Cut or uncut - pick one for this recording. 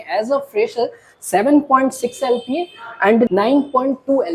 cut